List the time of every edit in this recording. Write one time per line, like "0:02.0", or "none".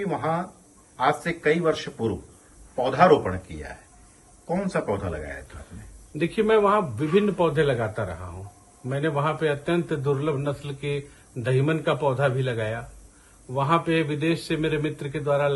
none